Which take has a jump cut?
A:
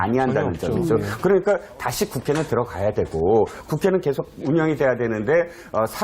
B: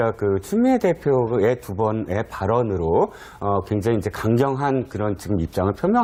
A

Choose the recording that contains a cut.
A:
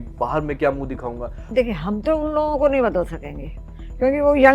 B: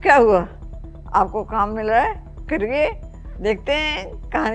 A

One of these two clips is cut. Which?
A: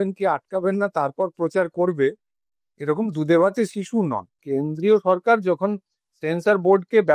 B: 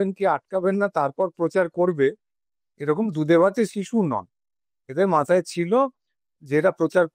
A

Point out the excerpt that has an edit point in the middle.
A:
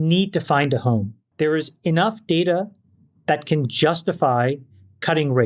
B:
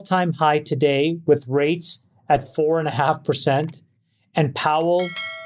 A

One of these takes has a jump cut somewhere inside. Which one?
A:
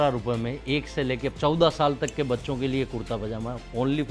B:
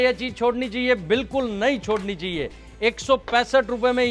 A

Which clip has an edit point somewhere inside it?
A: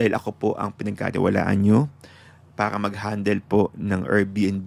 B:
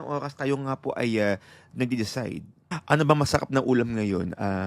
B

